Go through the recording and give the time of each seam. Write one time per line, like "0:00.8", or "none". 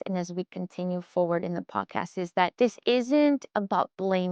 0:02.5